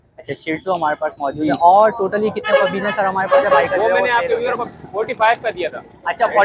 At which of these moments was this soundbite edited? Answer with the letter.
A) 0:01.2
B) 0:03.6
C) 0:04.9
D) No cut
B